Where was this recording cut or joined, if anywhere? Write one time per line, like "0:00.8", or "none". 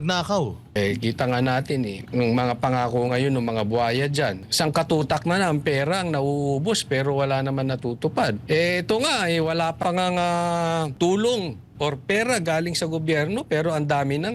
0:00.8
0:02.0
0:04.4
0:08.4
0:09.8
0:10.9